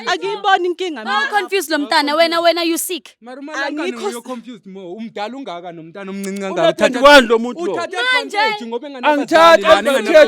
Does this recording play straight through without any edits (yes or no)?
yes